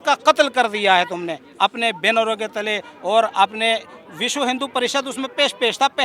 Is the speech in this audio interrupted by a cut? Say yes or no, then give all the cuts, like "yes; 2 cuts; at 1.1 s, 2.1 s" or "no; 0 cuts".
no; 0 cuts